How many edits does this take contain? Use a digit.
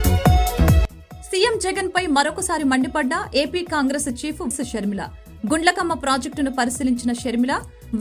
2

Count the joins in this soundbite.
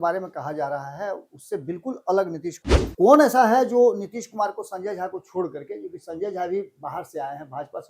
1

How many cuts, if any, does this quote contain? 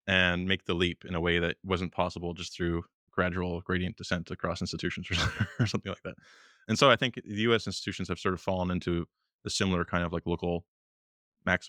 0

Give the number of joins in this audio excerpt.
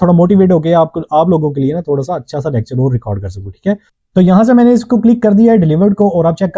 1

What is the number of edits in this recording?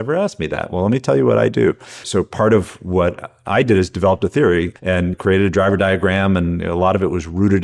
2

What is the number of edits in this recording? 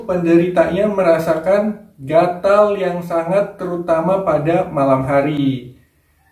0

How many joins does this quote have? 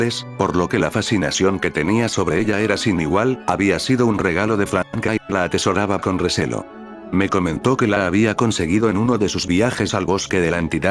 0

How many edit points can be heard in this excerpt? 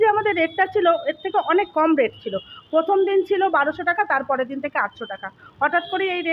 0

